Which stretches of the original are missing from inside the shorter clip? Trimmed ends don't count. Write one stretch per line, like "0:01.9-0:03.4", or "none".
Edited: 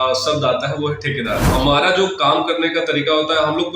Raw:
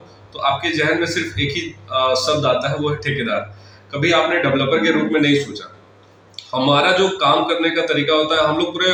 0:03.5-0:06.5